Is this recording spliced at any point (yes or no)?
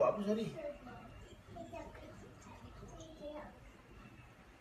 yes